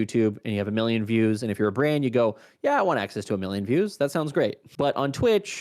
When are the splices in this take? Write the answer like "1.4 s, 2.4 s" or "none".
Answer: 4.6 s